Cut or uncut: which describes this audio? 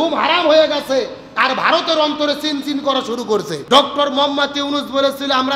cut